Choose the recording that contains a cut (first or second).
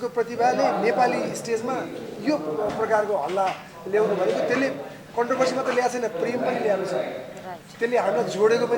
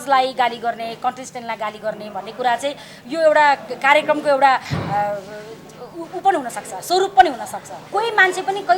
second